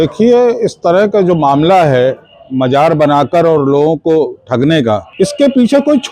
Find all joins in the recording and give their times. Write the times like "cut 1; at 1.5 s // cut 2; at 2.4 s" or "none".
cut 1; at 5.1 s